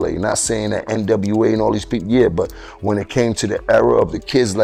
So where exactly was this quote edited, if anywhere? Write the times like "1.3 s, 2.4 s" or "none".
none